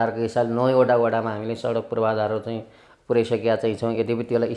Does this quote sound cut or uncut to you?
uncut